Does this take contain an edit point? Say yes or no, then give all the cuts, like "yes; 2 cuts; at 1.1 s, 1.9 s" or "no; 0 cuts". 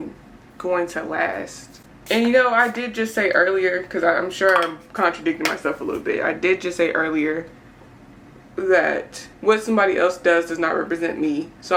no; 0 cuts